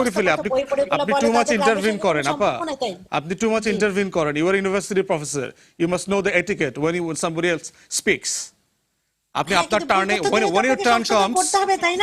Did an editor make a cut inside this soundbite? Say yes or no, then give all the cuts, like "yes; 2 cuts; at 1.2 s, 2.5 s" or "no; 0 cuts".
no; 0 cuts